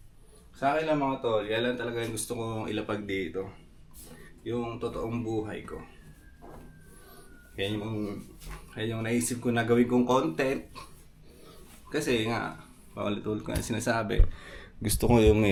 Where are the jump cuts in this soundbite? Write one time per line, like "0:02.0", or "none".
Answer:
none